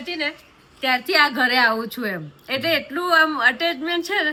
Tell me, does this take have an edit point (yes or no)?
no